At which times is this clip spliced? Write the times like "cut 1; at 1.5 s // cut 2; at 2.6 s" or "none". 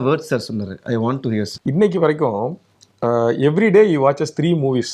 cut 1; at 1.5 s